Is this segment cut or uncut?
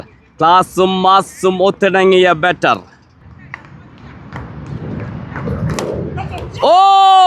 cut